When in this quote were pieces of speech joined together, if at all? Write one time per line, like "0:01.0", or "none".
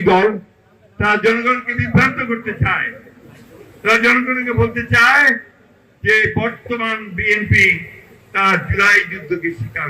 none